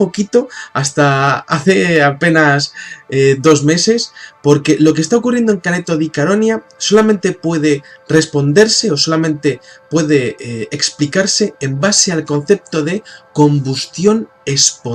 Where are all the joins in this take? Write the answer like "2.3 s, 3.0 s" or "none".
9.7 s